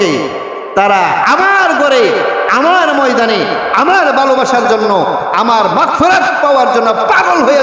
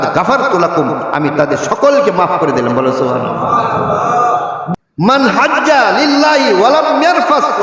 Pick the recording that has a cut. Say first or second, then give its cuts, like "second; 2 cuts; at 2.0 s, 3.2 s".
second; 1 cut; at 4.7 s